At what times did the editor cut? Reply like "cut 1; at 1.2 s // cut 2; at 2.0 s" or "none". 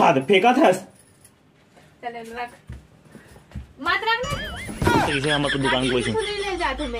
cut 1; at 5.1 s